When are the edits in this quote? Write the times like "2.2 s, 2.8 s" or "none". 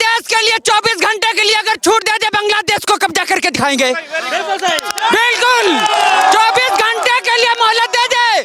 none